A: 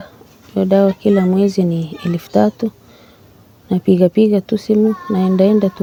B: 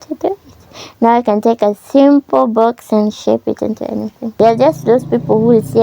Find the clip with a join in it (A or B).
B